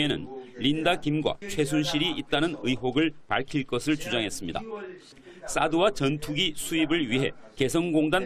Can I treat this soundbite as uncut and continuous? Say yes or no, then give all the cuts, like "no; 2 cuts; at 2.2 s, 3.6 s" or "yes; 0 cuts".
no; 1 cut; at 6.5 s